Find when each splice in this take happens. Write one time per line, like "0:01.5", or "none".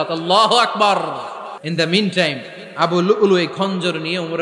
0:01.6